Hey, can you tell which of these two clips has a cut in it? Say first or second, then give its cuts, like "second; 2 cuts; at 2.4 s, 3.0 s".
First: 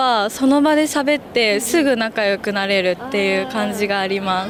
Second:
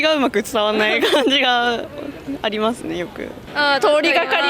second; 1 cut; at 3.4 s